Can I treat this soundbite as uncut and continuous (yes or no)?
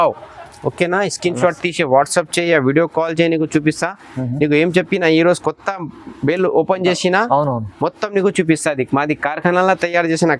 yes